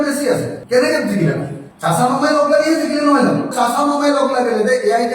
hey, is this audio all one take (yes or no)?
yes